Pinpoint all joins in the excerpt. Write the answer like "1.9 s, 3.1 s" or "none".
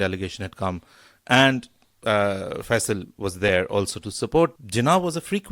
4.6 s